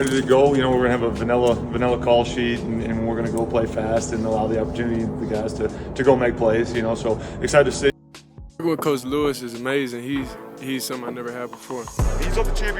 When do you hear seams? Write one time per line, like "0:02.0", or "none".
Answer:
0:07.9